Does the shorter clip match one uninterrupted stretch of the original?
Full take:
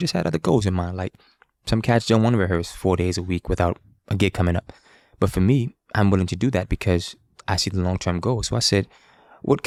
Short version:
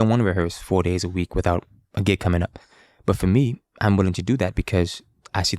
yes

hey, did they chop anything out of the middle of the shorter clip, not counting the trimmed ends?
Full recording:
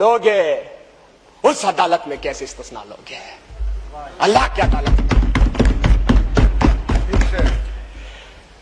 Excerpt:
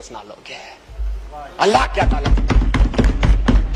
no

